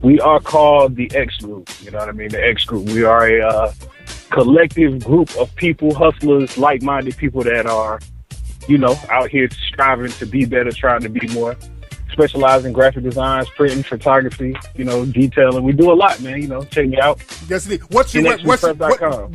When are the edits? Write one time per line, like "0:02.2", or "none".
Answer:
0:10.0